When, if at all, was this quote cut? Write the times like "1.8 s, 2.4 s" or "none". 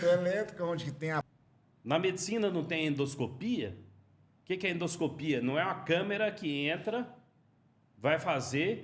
1.3 s